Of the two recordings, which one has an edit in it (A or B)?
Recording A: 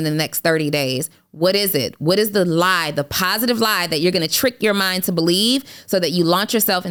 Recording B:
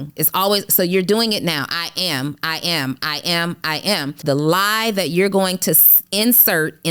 B